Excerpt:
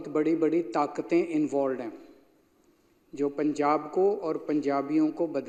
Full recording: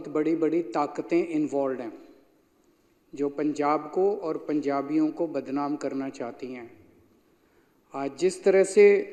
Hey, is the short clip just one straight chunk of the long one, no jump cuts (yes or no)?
yes